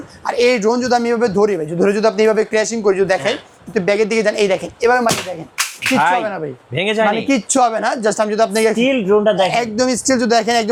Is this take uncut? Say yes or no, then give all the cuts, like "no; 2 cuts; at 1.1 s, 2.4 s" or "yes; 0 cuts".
yes; 0 cuts